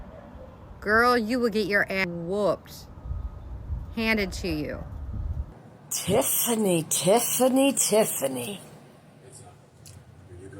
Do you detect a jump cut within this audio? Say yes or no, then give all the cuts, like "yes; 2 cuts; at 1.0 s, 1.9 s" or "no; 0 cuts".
yes; 2 cuts; at 2.0 s, 5.5 s